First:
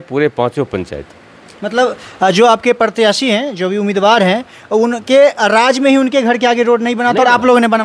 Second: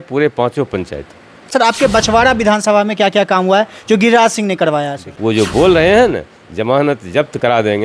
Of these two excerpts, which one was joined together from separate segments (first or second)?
second